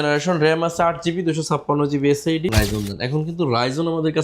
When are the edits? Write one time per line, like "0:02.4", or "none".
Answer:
0:02.5